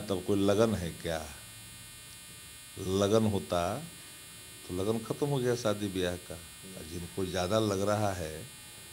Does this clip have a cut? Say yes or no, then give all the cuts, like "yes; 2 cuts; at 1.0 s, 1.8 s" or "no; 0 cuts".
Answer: no; 0 cuts